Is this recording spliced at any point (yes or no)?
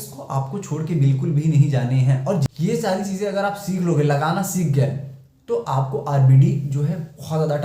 yes